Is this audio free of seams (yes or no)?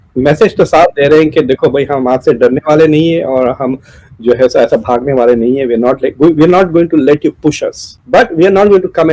yes